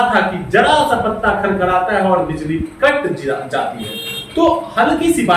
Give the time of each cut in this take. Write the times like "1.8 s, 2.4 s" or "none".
none